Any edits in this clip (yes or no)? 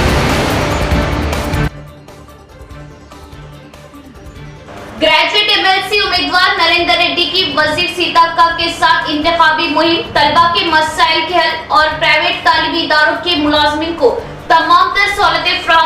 no